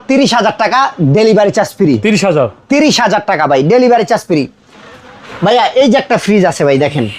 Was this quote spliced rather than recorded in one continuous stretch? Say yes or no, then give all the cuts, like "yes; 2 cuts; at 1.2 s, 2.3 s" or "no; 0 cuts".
no; 0 cuts